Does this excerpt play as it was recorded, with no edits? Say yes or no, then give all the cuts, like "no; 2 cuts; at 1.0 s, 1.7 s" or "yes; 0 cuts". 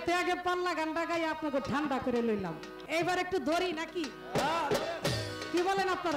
no; 1 cut; at 2.7 s